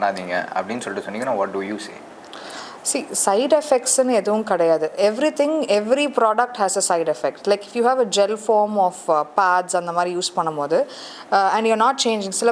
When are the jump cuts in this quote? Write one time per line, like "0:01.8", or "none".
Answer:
none